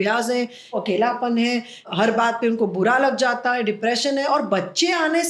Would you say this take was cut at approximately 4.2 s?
no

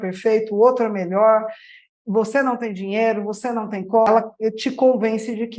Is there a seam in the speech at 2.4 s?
no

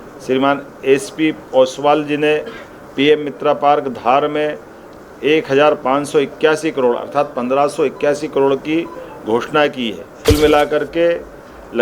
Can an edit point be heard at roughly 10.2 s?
yes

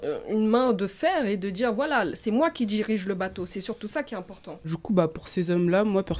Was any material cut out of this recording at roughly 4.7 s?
yes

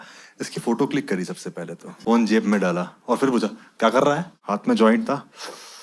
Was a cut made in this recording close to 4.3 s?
yes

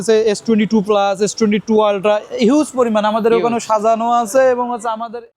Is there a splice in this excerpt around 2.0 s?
no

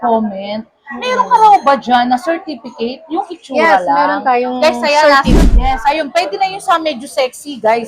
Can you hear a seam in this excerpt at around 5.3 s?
yes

